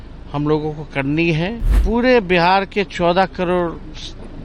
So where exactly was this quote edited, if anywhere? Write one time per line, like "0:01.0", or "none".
0:01.7

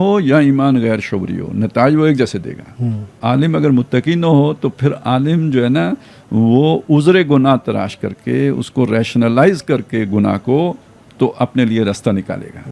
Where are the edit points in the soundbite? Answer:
0:03.2

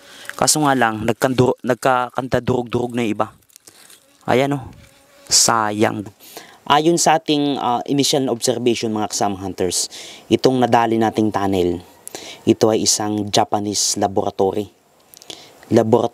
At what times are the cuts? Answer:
0:06.1

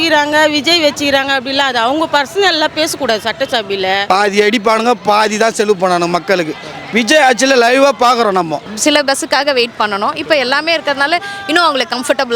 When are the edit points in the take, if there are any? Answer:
0:04.0
0:08.7

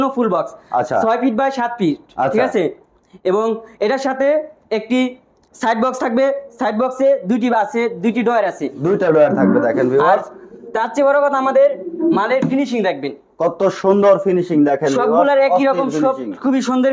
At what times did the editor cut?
none

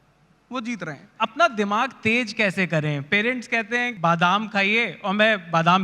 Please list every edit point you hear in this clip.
0:01.1
0:03.9

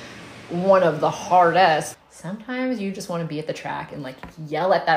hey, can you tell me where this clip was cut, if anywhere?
0:02.0

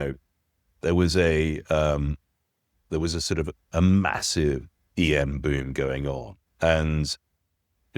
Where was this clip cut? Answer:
none

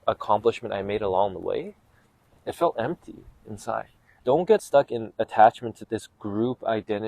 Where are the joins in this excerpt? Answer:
0:04.1
0:05.8

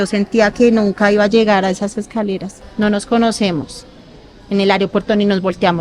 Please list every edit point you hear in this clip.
0:02.6

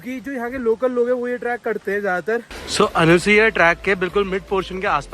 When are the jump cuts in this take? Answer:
0:02.6

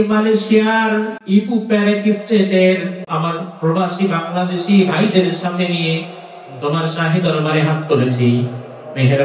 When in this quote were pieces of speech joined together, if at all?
0:01.2
0:03.0

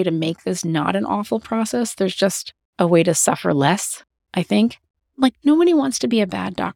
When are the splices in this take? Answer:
0:05.0

